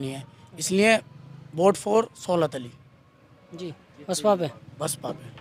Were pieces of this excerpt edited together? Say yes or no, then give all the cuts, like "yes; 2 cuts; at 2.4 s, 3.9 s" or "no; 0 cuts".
no; 0 cuts